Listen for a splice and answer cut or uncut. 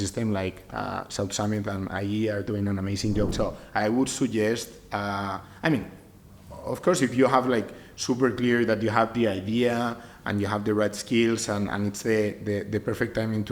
cut